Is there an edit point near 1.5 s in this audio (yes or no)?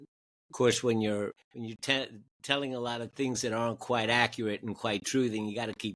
yes